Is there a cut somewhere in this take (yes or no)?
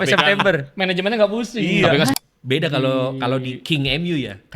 yes